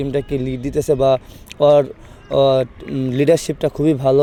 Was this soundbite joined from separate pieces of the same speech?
no; 0 cuts

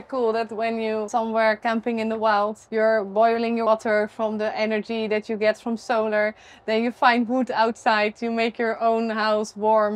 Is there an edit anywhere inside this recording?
yes; 3 cuts; at 1.1 s, 2.6 s, 3.7 s

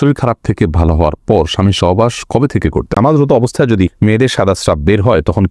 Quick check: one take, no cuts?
no; 2 cuts; at 3.0 s, 3.9 s

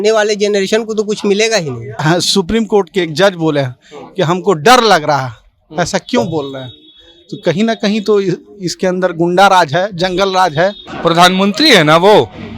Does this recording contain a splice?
yes; 2 cuts; at 2.0 s, 10.9 s

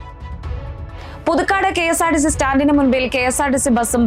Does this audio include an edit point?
yes; 1 cut; at 1.0 s

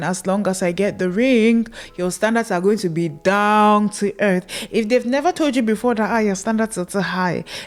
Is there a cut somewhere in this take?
no; 0 cuts

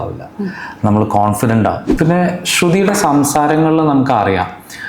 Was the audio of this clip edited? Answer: yes; 1 cut; at 1.9 s

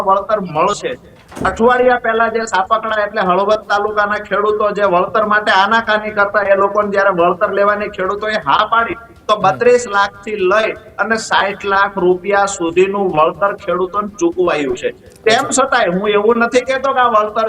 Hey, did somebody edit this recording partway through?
no; 0 cuts

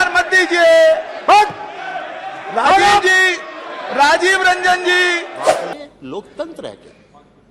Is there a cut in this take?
yes; 1 cut; at 5.6 s

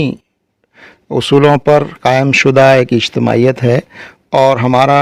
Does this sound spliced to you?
no; 0 cuts

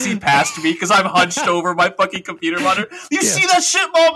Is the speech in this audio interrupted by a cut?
no; 0 cuts

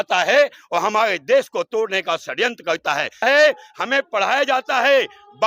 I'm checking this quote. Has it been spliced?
yes; 1 cut; at 3.2 s

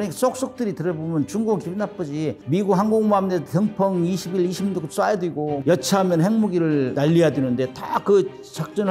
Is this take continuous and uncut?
yes; 0 cuts

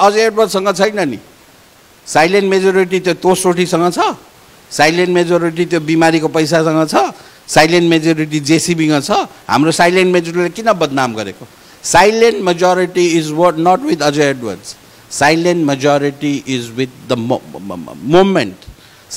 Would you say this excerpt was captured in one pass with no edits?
yes; 0 cuts

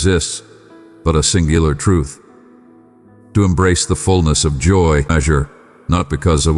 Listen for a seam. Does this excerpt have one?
yes; 1 cut; at 5.1 s

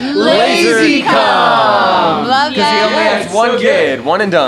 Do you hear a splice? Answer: no; 0 cuts

